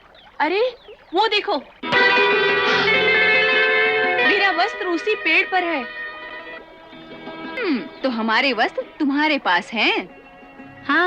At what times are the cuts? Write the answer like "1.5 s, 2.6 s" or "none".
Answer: 7.6 s